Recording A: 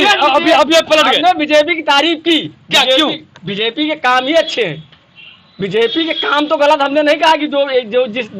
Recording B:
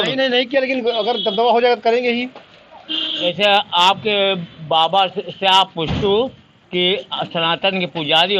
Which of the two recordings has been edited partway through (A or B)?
B